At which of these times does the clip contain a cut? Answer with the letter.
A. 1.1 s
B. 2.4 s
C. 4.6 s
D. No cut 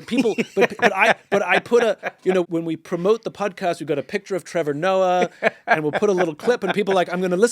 B